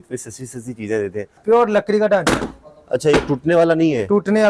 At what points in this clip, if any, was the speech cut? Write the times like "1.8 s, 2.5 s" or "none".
1.4 s